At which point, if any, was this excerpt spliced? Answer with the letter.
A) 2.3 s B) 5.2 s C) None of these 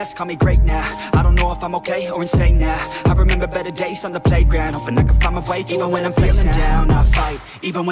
A